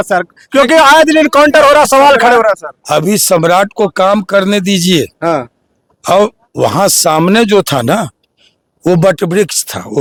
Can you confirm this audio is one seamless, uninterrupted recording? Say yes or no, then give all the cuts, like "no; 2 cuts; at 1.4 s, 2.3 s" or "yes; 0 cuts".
yes; 0 cuts